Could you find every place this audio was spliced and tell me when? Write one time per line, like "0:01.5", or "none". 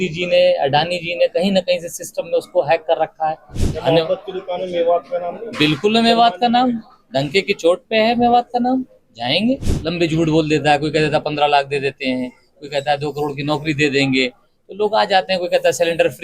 0:03.5
0:09.7